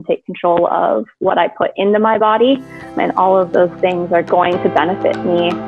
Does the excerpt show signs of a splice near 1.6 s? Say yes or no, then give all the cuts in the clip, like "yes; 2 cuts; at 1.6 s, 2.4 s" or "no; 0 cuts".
no; 2 cuts; at 2.9 s, 4.3 s